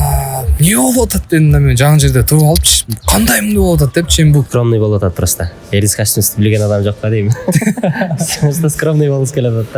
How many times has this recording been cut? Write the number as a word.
one